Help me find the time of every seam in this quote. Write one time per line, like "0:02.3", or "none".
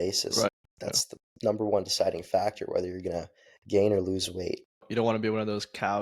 0:04.9